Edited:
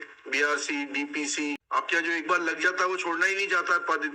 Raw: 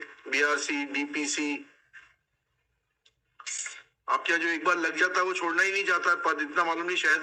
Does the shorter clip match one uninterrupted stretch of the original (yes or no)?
no